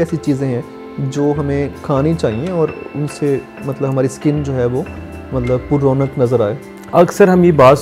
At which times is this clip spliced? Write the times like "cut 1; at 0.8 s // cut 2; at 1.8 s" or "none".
cut 1; at 6.7 s